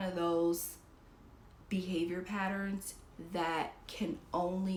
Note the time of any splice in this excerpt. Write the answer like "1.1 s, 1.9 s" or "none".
none